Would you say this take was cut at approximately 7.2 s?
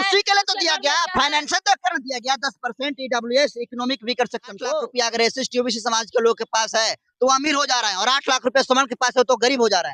no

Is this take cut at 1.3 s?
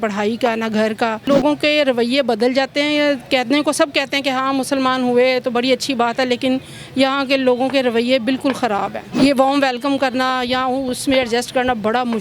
yes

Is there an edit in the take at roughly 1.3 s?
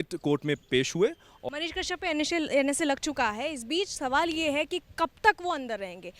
yes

